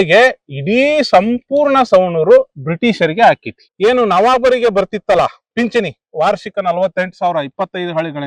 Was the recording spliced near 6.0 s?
no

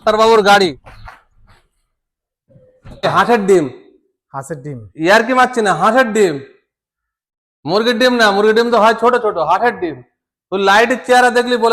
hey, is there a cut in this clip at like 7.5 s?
no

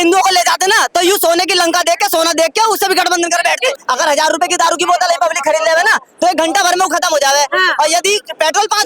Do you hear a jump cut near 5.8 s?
no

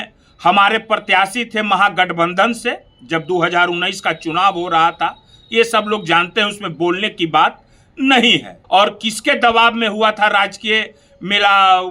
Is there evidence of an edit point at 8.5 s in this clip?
yes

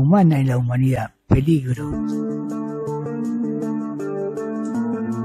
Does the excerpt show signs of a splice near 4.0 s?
no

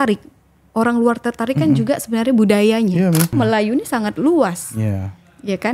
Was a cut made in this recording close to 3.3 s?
yes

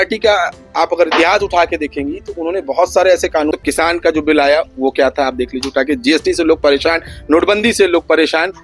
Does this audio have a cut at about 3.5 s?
yes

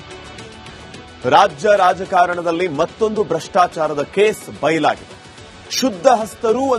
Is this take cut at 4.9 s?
no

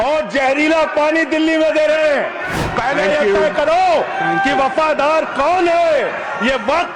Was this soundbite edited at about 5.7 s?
no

